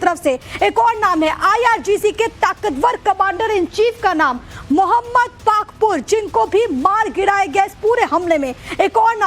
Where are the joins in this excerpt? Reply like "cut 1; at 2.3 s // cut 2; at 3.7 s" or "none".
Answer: cut 1; at 4.1 s